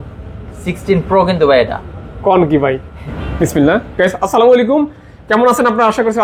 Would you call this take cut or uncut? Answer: uncut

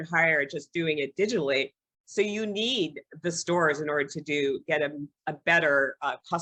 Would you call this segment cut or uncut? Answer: uncut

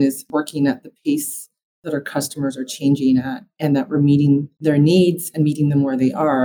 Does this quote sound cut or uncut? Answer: uncut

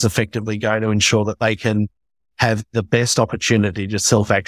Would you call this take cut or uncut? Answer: uncut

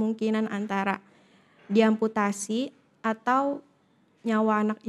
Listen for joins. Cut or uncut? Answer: uncut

